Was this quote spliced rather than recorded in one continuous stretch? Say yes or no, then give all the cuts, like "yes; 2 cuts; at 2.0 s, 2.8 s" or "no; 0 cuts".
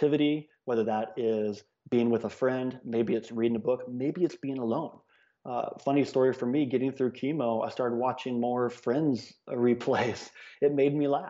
no; 0 cuts